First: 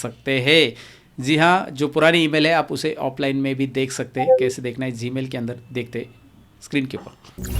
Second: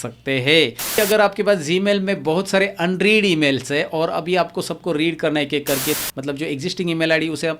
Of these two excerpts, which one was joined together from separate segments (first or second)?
second